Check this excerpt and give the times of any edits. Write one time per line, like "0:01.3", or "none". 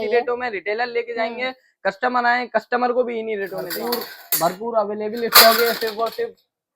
0:03.7